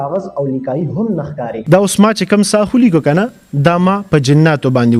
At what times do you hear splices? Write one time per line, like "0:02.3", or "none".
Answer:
0:01.5